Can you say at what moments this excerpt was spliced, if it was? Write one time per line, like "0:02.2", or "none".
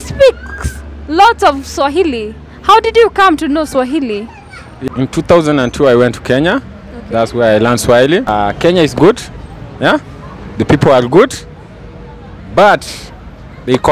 0:04.8
0:08.3